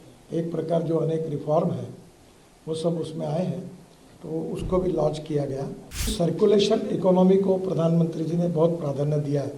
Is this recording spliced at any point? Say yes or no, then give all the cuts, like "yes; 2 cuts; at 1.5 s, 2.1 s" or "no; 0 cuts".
yes; 1 cut; at 6.1 s